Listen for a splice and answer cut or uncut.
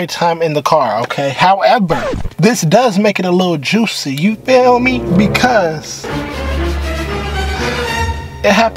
uncut